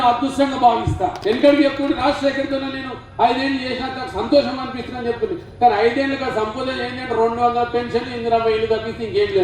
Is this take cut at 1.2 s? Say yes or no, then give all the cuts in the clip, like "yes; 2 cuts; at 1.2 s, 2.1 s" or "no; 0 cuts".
yes; 1 cut; at 1.2 s